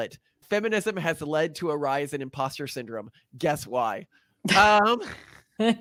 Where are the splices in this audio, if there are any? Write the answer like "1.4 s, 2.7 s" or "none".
none